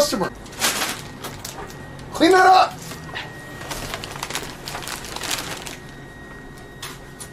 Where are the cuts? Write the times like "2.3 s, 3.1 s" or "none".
none